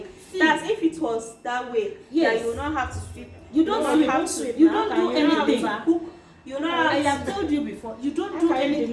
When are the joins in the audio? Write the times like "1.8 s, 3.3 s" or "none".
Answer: none